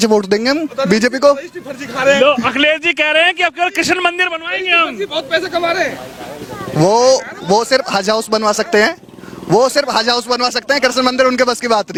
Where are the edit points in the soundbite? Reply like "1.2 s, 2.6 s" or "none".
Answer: none